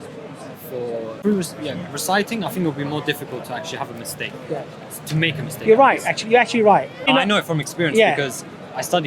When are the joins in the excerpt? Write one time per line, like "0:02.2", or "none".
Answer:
0:01.2
0:07.1